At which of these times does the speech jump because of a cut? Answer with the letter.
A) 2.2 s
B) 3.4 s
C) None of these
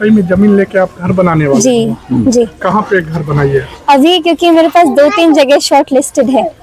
C